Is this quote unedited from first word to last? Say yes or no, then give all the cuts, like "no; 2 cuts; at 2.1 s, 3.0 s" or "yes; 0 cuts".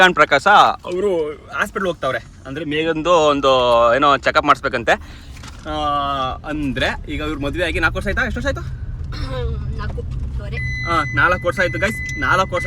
yes; 0 cuts